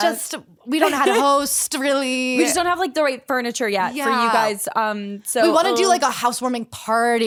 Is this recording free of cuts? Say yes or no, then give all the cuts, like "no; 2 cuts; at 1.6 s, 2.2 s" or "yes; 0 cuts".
yes; 0 cuts